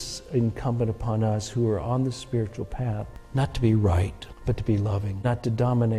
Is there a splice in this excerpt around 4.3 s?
yes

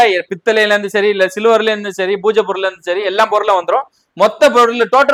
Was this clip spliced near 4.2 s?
no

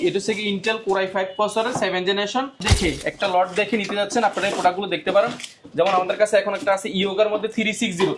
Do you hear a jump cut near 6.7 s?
no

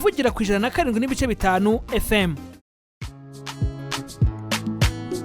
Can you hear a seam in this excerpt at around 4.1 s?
no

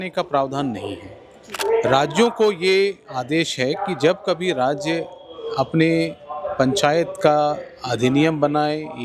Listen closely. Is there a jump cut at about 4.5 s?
no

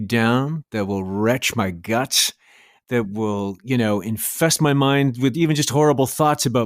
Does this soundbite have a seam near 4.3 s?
yes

